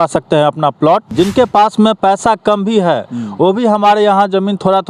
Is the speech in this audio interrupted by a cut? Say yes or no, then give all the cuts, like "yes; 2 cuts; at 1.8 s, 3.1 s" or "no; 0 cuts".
yes; 1 cut; at 1.1 s